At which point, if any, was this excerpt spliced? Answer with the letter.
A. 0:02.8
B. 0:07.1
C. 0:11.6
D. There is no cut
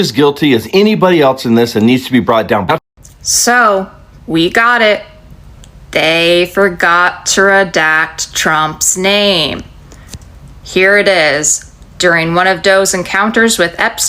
A